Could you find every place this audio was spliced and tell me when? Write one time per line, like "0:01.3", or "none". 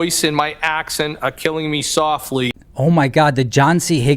0:02.6